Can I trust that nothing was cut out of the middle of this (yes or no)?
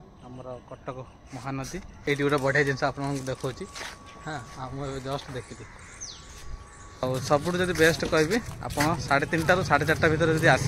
no